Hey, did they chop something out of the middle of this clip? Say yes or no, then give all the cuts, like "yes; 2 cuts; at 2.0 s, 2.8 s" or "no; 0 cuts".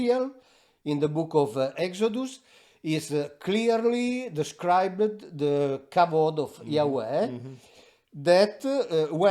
yes; 1 cut; at 1.7 s